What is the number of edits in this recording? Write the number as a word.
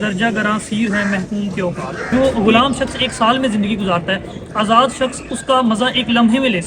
one